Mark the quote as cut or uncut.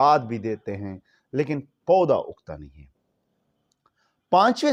uncut